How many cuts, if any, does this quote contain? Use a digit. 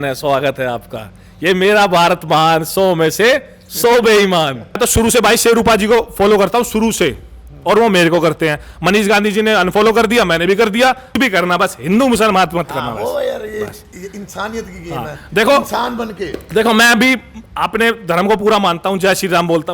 2